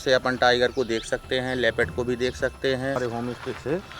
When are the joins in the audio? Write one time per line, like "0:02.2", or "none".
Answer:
0:03.0